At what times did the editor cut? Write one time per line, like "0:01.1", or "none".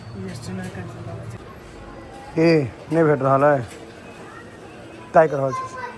0:01.5